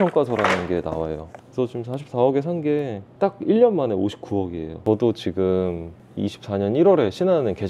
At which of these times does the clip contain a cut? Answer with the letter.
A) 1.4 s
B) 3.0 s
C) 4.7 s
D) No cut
C